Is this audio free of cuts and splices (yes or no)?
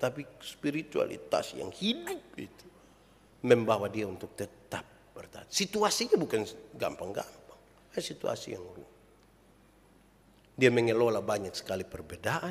yes